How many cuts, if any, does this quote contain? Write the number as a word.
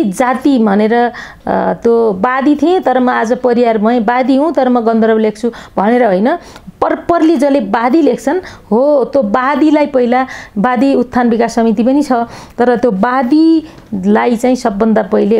zero